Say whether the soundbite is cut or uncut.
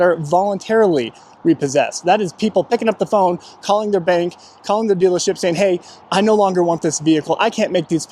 uncut